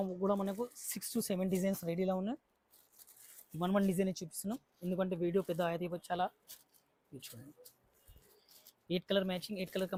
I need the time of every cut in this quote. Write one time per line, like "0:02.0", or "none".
none